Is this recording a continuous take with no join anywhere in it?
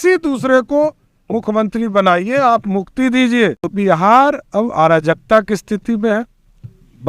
no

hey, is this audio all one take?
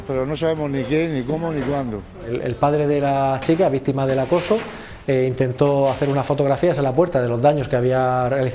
no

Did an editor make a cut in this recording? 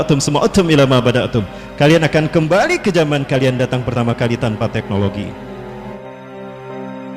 yes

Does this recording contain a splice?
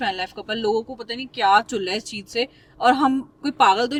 no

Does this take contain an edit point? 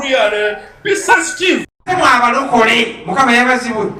yes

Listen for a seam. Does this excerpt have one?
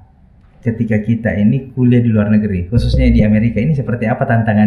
no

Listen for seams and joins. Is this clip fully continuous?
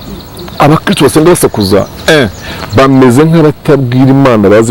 yes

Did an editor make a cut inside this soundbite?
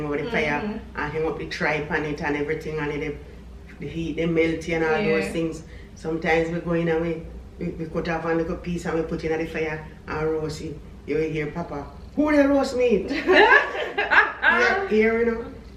no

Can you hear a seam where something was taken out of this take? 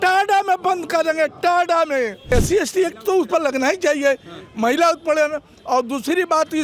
yes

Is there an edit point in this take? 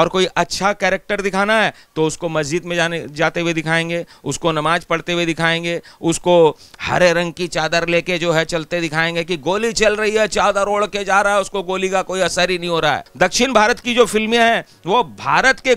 yes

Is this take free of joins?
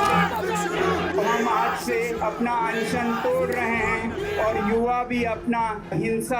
yes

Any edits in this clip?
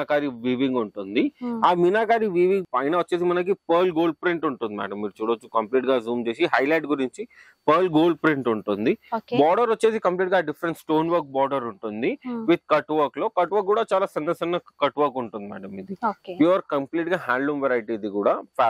no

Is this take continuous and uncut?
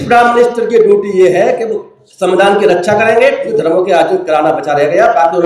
no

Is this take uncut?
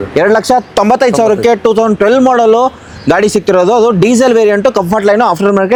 yes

